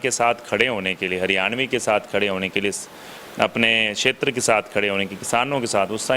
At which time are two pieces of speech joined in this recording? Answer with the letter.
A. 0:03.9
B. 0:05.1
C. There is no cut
C